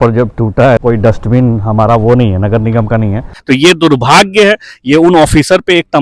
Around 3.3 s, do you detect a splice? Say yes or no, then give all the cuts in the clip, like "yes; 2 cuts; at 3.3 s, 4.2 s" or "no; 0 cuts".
yes; 2 cuts; at 0.8 s, 3.3 s